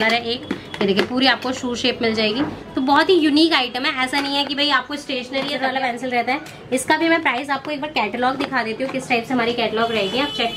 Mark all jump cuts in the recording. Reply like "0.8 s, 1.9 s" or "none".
5.5 s